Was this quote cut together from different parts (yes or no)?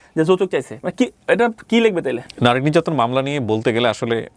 no